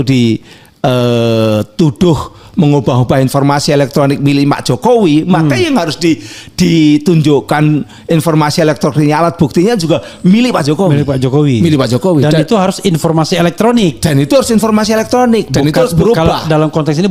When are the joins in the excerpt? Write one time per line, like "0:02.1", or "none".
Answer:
none